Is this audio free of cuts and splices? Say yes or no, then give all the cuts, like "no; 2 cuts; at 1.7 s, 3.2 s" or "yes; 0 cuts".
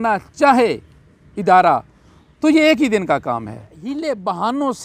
no; 1 cut; at 3.8 s